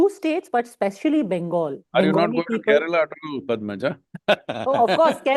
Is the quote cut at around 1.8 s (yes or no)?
yes